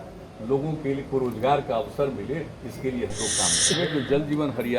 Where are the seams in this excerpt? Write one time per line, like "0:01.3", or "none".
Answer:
0:03.8